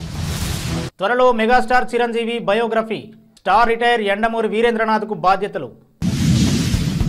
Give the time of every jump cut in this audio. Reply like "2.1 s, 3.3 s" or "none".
0.9 s